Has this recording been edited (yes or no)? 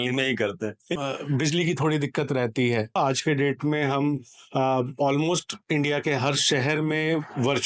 yes